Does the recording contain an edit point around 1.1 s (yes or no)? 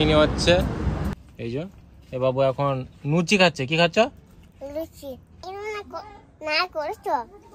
yes